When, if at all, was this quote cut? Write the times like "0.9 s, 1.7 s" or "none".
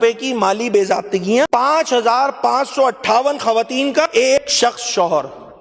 1.5 s, 4.3 s